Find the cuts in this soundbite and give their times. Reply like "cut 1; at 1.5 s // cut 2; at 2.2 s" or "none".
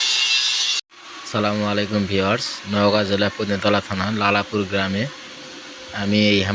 cut 1; at 0.9 s